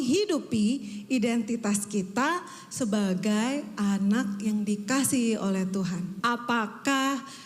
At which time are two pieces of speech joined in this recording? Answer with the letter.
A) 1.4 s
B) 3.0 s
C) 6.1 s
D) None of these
C